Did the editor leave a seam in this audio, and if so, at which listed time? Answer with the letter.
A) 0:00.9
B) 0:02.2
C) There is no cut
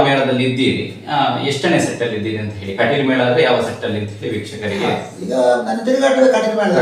C